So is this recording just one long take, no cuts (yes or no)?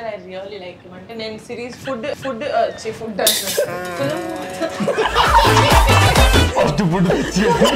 yes